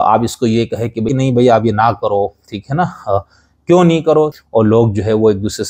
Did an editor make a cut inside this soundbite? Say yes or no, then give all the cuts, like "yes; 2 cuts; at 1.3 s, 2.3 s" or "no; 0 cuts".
yes; 2 cuts; at 1.1 s, 4.4 s